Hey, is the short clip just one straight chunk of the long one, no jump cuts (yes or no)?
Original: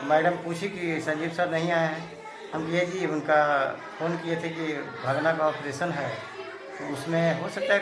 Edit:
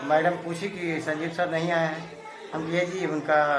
yes